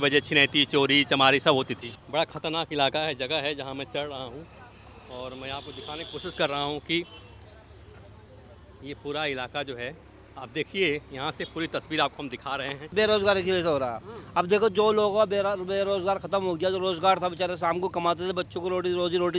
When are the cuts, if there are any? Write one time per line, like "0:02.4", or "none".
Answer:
0:01.9
0:12.9